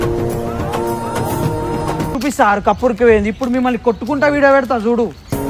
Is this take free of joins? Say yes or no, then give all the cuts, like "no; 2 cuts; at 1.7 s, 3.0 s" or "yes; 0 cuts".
no; 1 cut; at 2.1 s